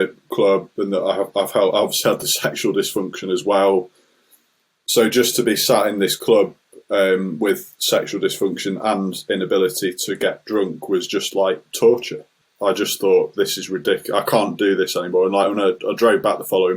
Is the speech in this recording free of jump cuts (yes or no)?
no